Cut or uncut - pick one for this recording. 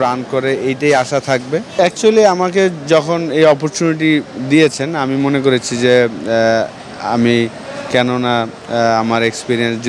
cut